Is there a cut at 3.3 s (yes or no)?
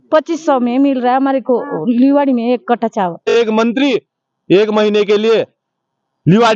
yes